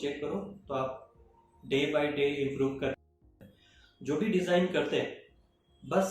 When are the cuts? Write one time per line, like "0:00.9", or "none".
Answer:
0:03.2